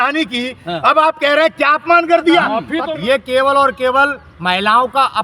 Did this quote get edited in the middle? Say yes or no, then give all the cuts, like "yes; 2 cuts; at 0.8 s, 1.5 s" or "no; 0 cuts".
yes; 1 cut; at 2.7 s